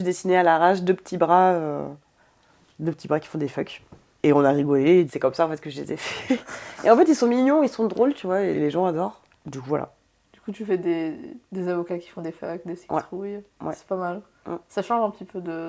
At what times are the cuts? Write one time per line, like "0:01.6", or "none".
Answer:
none